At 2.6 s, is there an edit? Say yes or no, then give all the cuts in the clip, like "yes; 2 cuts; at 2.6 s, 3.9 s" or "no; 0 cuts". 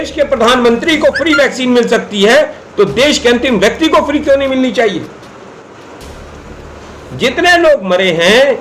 no; 1 cut; at 5.8 s